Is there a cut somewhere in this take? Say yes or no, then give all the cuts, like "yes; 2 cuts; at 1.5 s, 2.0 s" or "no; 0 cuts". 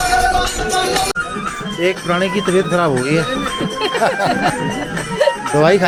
no; 0 cuts